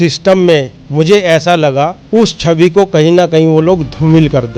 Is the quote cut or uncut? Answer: cut